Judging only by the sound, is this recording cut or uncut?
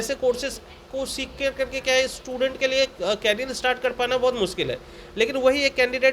uncut